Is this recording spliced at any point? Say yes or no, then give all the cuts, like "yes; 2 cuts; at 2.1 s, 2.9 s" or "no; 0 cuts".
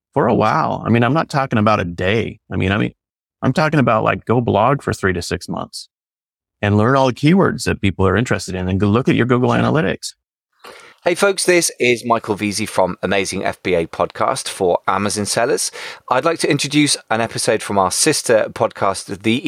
yes; 1 cut; at 10.1 s